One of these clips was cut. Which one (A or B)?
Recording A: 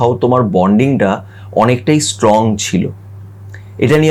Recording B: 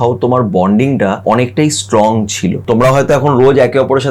B